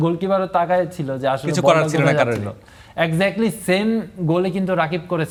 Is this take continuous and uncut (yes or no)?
yes